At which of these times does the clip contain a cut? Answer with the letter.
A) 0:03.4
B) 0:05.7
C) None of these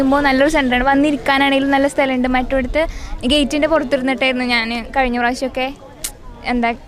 C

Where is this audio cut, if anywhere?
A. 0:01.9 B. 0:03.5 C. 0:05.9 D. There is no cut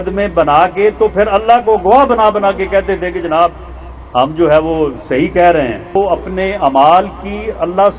C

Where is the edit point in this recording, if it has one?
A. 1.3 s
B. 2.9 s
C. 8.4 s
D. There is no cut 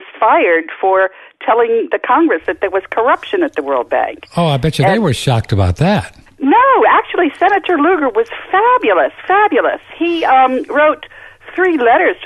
A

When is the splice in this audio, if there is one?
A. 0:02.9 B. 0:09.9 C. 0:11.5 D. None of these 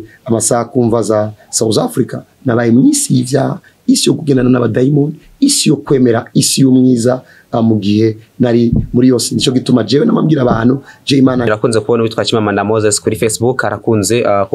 C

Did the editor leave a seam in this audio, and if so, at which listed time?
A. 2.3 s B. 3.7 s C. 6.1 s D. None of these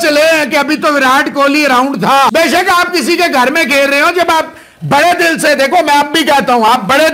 A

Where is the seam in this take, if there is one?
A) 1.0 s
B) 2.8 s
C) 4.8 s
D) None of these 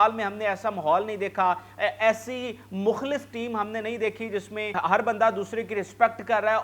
C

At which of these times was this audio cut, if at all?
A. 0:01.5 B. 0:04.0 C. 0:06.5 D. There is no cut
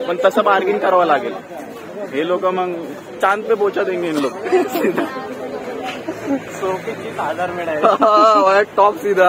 D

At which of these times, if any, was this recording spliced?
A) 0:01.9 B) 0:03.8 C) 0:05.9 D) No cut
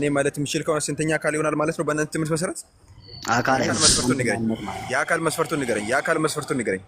B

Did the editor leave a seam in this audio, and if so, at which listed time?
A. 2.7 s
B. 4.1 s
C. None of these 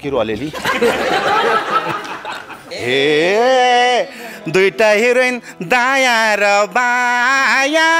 A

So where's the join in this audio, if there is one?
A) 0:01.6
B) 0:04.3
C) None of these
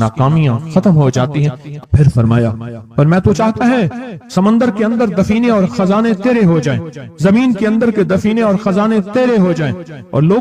A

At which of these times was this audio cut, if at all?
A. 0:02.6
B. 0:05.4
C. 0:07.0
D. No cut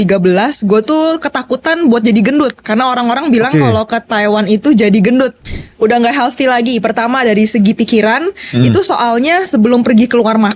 B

